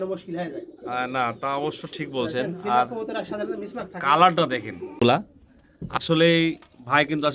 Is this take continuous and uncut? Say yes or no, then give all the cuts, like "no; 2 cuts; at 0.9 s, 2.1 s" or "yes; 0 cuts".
no; 1 cut; at 5.0 s